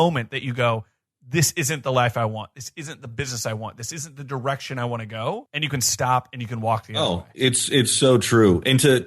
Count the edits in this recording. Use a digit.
2